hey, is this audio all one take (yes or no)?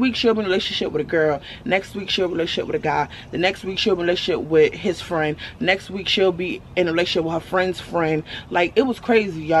yes